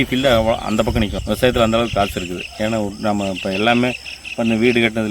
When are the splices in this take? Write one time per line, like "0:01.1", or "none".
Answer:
0:01.2